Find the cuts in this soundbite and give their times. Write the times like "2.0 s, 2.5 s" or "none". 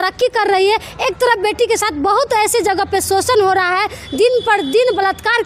none

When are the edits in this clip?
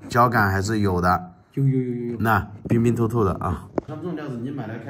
2.5 s, 3.9 s

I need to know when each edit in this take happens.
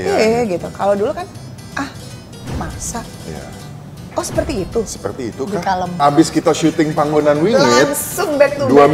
5.9 s

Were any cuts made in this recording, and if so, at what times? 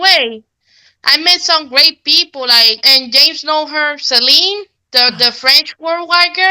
2.8 s

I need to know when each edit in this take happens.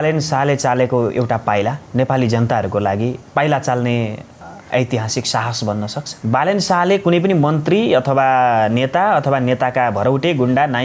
1.8 s, 3.2 s, 6.1 s

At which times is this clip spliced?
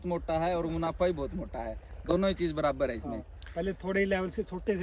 none

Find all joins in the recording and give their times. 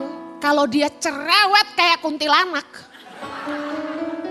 none

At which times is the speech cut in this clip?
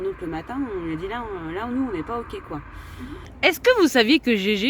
3.2 s

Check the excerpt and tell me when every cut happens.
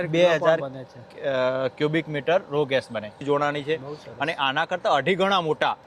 3.2 s

